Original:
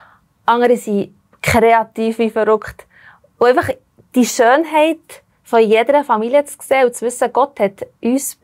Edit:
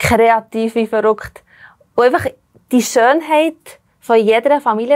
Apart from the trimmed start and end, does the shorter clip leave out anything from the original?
no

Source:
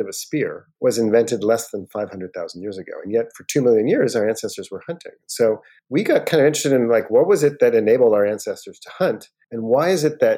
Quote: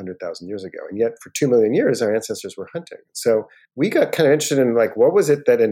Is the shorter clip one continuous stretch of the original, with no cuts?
yes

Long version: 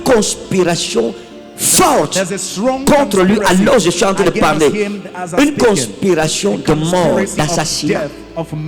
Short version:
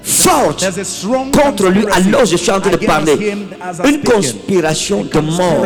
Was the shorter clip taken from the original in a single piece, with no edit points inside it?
yes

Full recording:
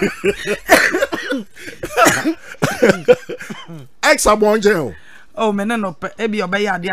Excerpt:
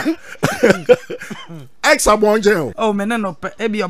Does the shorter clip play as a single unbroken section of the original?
no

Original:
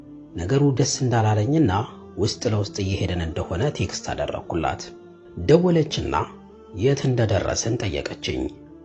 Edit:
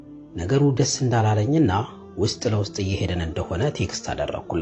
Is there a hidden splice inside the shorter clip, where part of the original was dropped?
no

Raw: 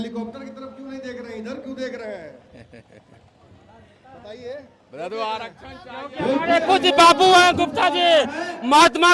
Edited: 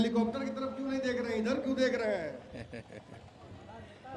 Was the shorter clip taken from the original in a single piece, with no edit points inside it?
yes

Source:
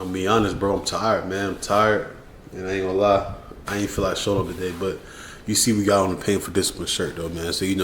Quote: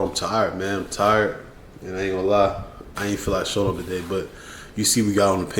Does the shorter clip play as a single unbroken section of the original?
yes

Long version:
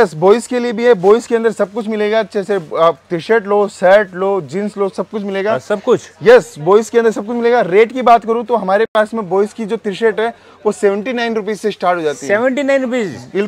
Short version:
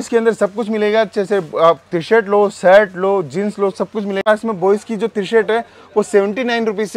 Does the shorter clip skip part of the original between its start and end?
yes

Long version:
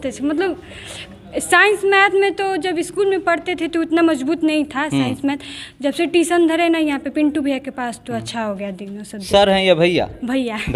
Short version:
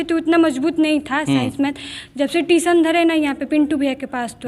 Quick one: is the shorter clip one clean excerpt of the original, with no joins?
yes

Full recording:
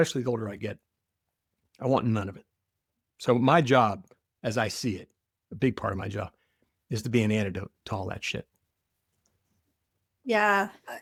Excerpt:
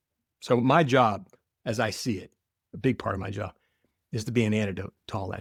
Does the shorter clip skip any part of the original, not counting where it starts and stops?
no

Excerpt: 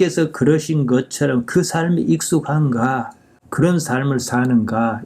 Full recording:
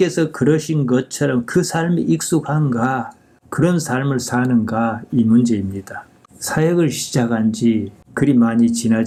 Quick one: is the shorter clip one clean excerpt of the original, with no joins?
yes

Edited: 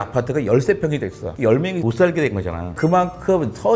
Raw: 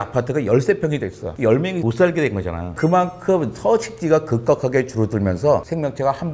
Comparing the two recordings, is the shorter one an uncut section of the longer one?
yes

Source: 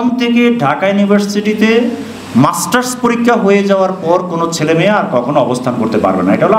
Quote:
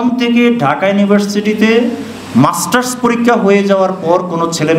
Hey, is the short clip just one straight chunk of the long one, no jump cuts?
yes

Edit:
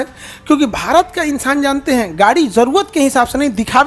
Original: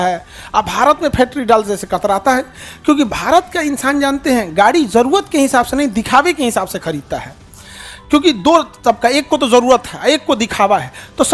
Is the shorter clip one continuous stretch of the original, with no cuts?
yes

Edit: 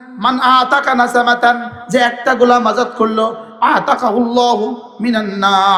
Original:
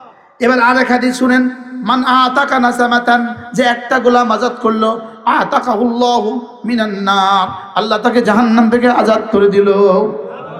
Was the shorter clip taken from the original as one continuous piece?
yes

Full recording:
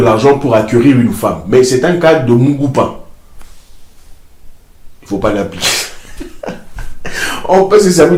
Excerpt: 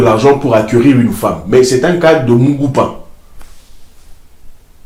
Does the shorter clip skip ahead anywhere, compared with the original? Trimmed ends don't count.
no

